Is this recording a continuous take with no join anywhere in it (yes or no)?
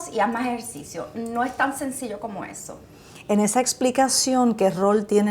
yes